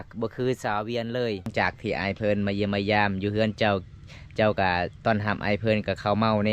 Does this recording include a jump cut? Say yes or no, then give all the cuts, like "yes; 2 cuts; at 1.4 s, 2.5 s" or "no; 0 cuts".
yes; 1 cut; at 1.5 s